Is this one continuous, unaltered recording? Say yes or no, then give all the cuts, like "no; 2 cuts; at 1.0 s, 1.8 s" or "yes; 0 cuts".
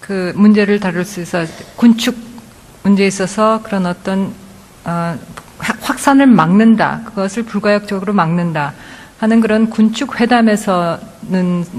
no; 1 cut; at 4.1 s